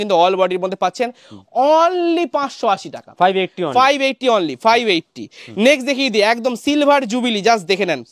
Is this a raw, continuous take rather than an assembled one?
yes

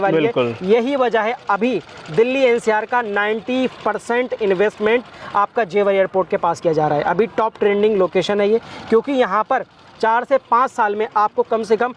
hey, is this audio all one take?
yes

